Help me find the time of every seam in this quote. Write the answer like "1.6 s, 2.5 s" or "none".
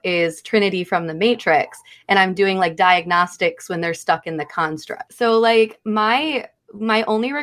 5.0 s

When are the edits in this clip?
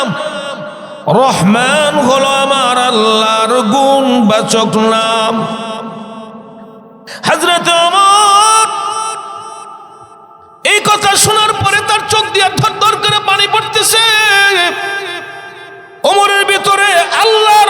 7.1 s

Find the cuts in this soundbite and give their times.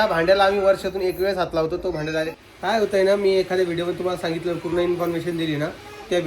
2.3 s

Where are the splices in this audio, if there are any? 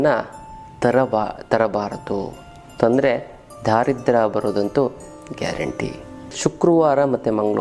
6.3 s

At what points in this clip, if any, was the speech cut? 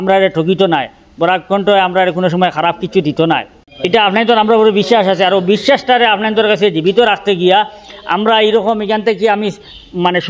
3.6 s

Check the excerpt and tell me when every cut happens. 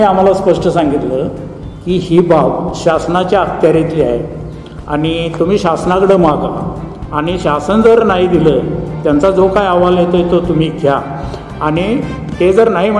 none

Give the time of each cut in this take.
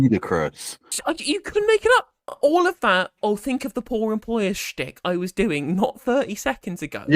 0.9 s, 2.2 s

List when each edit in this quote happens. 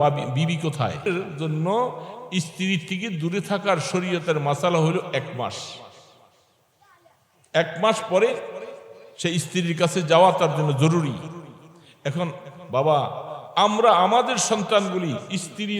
1.1 s

